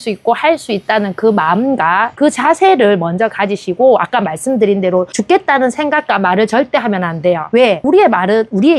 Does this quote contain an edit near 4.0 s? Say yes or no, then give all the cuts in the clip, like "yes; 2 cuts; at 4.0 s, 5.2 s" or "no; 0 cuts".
no; 0 cuts